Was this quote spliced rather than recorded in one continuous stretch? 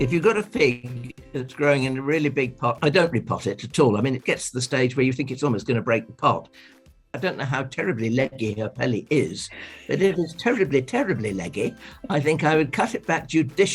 yes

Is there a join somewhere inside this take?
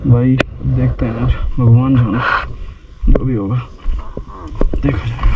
no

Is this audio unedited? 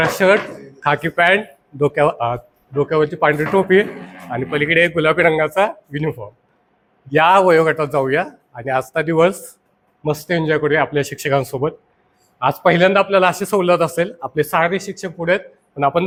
yes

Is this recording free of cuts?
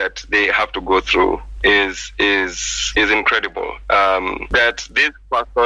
yes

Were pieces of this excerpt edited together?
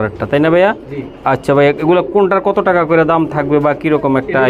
no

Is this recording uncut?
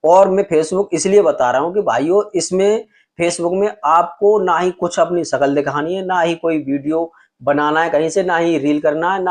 yes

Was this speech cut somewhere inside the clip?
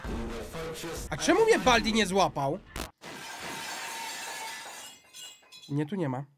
yes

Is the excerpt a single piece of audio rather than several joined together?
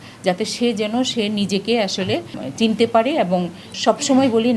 no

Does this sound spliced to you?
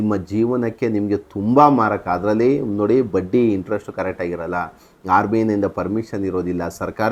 no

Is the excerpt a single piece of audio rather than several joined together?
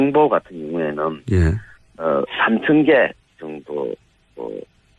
yes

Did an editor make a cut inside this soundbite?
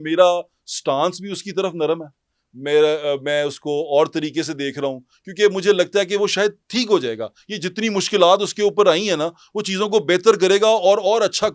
no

